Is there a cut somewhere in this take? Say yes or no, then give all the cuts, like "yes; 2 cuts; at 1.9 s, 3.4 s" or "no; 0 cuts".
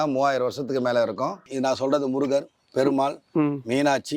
yes; 1 cut; at 1.4 s